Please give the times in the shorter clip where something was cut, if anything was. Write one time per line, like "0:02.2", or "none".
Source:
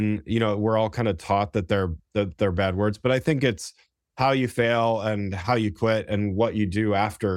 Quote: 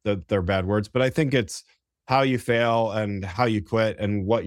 none